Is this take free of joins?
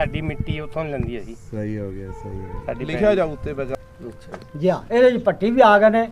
no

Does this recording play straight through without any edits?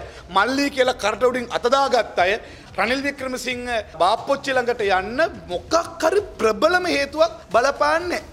no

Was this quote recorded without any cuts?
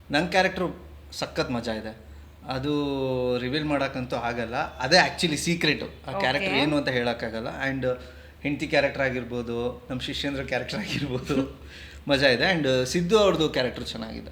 yes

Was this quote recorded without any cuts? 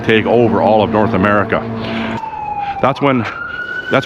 no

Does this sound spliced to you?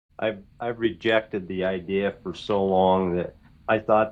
no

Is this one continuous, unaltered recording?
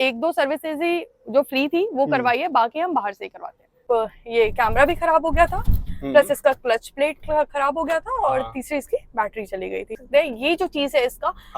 no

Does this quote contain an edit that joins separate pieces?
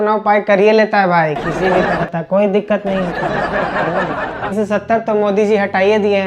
yes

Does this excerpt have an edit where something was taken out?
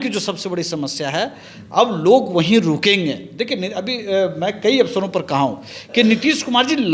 no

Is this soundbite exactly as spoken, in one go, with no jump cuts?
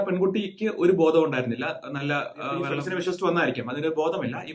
no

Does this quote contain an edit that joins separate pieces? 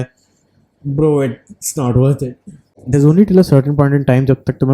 yes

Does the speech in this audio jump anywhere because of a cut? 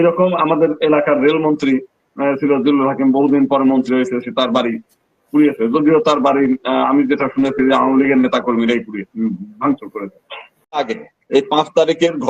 yes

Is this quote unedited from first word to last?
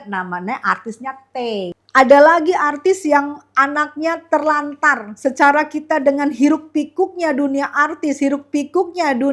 no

